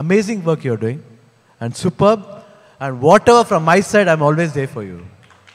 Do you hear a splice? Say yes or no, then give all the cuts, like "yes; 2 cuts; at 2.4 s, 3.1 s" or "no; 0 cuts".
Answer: no; 0 cuts